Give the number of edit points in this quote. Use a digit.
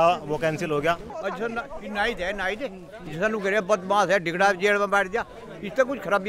1